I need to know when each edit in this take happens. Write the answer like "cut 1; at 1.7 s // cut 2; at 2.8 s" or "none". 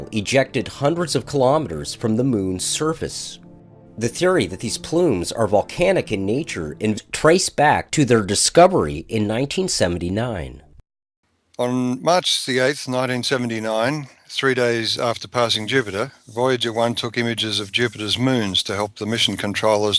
none